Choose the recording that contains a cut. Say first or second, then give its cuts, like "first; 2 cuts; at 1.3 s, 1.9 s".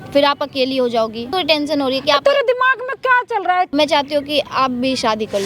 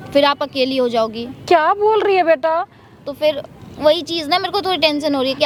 first; 2 cuts; at 1.3 s, 3.7 s